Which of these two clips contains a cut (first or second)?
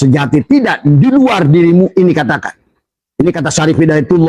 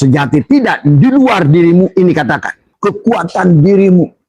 second